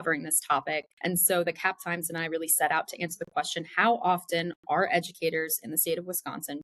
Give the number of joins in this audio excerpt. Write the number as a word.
one